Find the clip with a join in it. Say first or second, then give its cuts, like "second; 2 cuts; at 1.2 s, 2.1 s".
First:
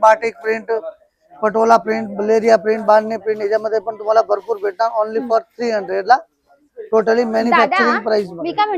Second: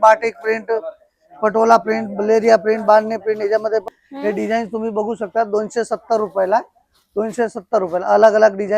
second; 1 cut; at 3.9 s